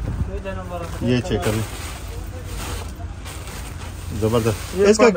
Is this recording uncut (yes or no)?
yes